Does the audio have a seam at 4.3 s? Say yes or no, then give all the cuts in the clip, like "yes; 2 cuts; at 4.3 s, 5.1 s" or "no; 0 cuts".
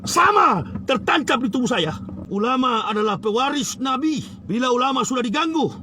yes; 2 cuts; at 2.1 s, 4.3 s